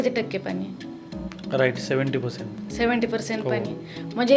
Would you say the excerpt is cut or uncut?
uncut